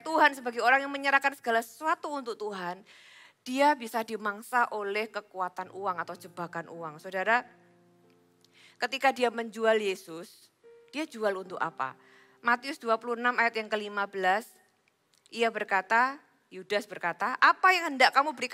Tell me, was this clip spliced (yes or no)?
no